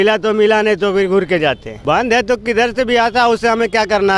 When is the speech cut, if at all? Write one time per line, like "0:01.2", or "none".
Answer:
0:01.7